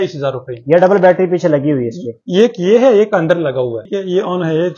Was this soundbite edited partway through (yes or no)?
yes